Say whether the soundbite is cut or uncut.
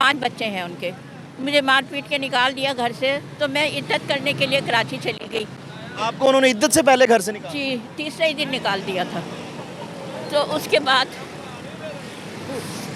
uncut